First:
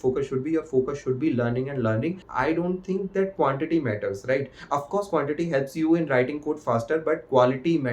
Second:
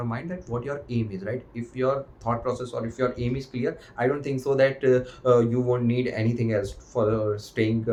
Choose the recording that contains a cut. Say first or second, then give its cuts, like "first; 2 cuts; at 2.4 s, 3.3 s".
first; 1 cut; at 2.2 s